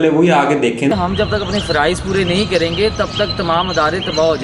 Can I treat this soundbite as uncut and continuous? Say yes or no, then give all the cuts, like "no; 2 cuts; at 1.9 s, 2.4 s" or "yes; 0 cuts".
no; 1 cut; at 0.9 s